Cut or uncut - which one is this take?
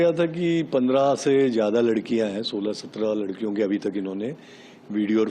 uncut